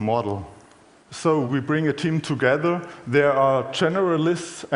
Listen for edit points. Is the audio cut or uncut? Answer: cut